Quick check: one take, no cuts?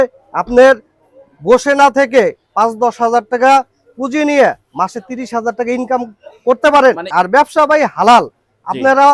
no; 1 cut; at 7.1 s

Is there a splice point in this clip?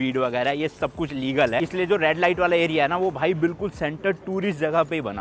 no; 0 cuts

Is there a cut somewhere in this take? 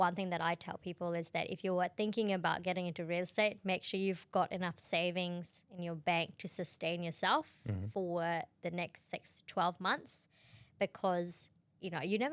no; 0 cuts

